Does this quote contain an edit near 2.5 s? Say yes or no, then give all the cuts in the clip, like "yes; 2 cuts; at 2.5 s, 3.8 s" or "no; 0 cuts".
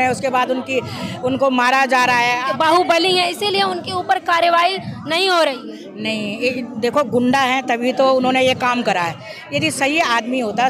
yes; 1 cut; at 2.5 s